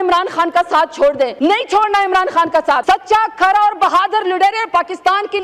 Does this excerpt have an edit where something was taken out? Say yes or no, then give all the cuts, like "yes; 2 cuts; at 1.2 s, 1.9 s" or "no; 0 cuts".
yes; 2 cuts; at 1.3 s, 2.8 s